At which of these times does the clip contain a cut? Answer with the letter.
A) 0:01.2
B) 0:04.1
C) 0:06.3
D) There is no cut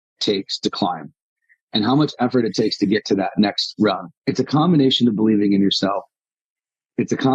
B